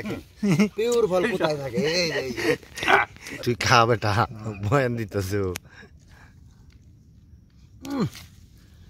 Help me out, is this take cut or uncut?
cut